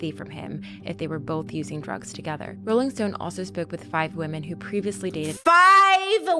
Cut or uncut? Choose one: uncut